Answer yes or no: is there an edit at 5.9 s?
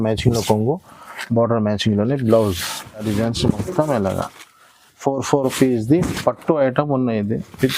no